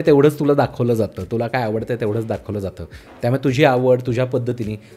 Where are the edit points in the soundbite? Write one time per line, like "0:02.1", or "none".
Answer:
none